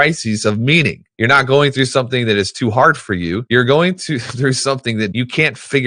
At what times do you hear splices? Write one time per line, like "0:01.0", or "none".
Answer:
0:01.0
0:03.4
0:05.1